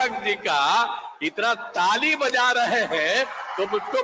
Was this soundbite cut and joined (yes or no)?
no